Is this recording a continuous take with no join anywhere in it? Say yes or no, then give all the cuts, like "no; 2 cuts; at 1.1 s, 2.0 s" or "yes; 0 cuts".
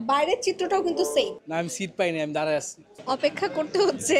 no; 2 cuts; at 1.4 s, 2.8 s